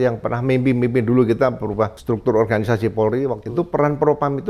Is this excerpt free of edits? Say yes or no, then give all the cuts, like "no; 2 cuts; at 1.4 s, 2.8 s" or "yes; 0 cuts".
no; 2 cuts; at 2.0 s, 3.4 s